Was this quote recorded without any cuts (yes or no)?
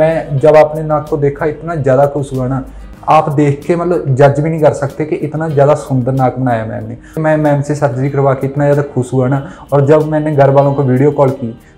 no